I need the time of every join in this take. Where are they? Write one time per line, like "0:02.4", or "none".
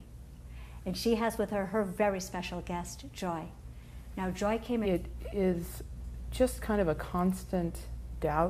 none